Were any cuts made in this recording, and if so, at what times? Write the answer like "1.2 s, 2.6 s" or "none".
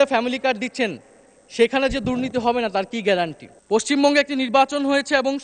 3.6 s